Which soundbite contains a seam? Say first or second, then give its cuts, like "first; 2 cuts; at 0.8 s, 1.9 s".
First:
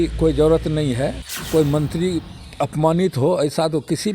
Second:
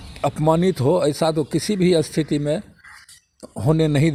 first; 1 cut; at 1.3 s